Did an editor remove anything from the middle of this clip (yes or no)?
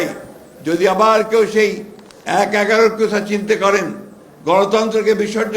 no